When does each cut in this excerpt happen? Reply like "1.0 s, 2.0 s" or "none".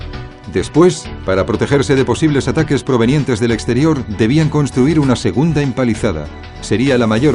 6.4 s